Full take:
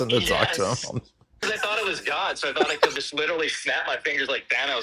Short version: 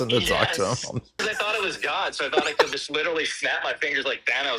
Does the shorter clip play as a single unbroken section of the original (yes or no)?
no